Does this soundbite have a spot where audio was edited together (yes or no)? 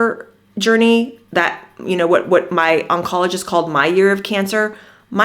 no